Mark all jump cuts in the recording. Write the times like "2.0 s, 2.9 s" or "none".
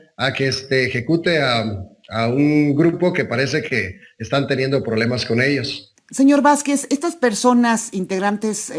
none